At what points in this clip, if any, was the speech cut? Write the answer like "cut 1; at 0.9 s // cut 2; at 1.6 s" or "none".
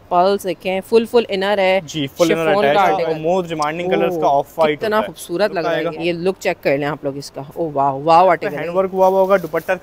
cut 1; at 3.0 s // cut 2; at 5.8 s // cut 3; at 8.5 s